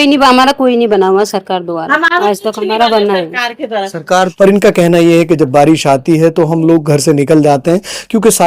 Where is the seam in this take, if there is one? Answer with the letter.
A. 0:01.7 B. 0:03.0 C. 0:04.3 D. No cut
C